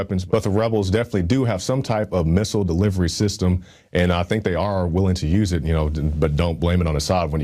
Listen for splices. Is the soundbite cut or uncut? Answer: uncut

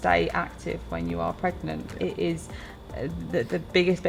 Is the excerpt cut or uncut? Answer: uncut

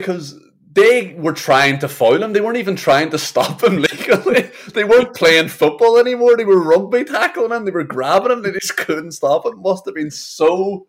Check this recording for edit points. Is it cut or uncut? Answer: uncut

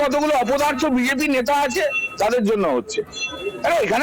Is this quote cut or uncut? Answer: uncut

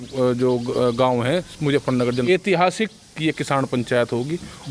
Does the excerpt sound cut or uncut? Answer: cut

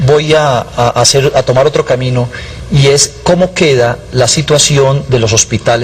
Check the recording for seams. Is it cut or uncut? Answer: uncut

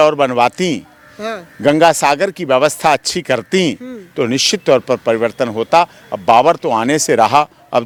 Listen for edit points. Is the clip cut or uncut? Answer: uncut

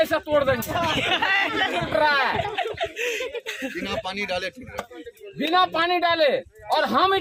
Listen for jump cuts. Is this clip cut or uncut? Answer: uncut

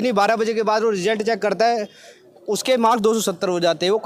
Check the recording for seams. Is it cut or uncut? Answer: uncut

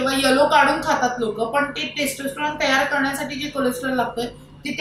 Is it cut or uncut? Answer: uncut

